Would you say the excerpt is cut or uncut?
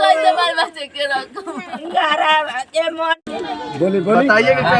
cut